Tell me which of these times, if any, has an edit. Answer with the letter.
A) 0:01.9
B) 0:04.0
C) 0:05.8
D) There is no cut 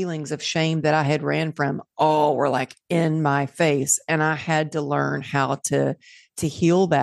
D